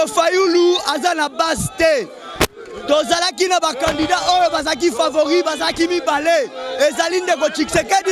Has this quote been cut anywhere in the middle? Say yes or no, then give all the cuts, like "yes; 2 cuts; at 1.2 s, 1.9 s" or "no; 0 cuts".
no; 0 cuts